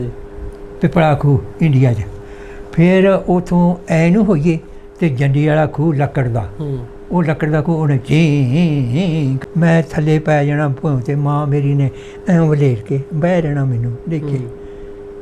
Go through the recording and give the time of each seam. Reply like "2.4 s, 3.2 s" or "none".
9.4 s